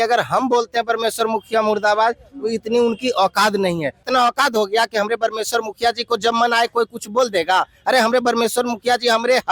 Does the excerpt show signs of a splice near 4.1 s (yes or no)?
yes